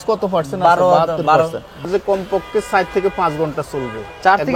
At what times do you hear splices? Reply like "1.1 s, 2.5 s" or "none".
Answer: 1.8 s

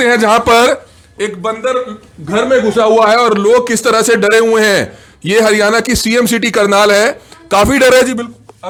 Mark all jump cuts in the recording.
none

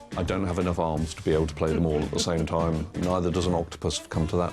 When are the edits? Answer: 3.0 s

